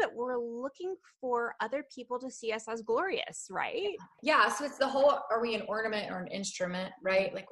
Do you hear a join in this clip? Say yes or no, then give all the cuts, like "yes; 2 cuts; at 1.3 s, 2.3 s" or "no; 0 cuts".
yes; 1 cut; at 4.1 s